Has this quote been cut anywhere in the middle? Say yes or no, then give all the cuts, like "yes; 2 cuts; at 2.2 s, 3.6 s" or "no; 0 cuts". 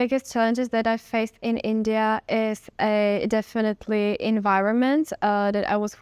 no; 0 cuts